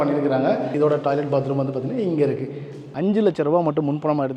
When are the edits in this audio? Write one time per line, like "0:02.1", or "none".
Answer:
0:00.7
0:03.0